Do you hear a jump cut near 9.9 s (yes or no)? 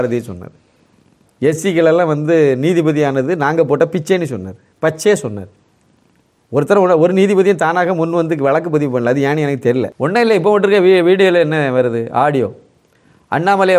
yes